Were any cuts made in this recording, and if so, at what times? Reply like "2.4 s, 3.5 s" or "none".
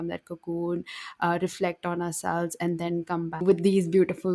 3.4 s